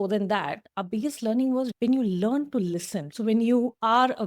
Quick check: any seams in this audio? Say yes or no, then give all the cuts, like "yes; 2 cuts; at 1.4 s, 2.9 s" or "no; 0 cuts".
yes; 2 cuts; at 1.7 s, 3.0 s